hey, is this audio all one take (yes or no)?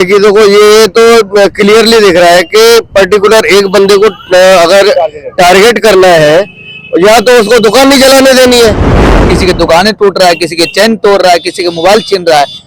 no